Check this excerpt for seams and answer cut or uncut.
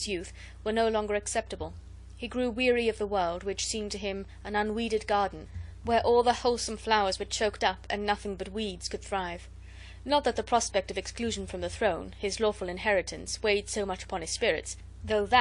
uncut